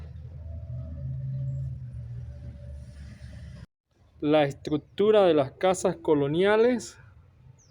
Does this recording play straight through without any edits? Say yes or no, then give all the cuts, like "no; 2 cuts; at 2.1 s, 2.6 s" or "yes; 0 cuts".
no; 1 cut; at 3.7 s